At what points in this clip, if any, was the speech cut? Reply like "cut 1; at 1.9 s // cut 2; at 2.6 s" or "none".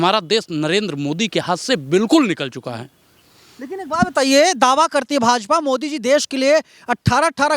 none